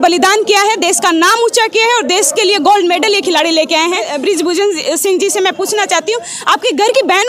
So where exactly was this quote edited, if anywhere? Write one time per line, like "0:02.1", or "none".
0:04.1